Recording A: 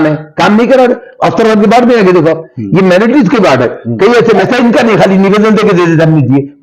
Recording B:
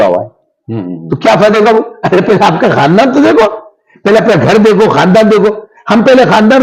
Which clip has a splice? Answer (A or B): A